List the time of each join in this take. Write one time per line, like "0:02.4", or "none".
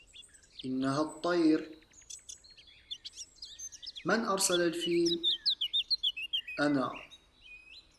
none